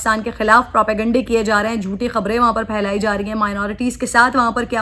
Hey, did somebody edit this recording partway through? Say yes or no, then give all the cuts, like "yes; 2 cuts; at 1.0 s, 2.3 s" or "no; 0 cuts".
no; 0 cuts